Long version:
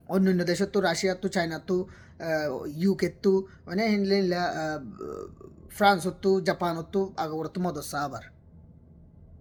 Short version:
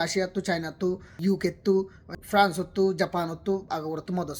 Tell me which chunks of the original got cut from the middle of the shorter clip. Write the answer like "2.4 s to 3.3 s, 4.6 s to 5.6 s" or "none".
2.0 s to 2.7 s, 3.6 s to 5.5 s